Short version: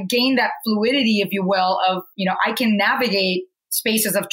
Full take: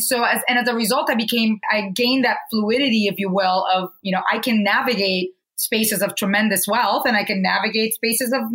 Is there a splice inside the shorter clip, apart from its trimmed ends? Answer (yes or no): no